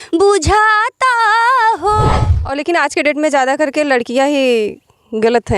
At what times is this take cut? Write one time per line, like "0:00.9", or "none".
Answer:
0:02.1